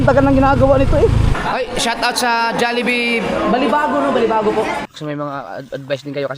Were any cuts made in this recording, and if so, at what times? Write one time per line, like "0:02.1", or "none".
0:01.3
0:04.8